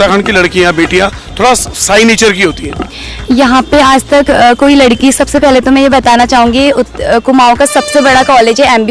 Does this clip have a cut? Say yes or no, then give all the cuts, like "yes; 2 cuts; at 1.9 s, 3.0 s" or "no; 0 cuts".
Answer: no; 0 cuts